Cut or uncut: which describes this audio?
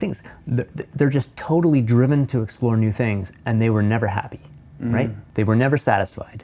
cut